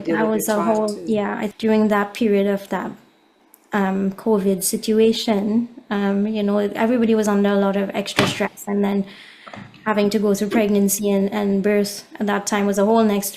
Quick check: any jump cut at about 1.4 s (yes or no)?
yes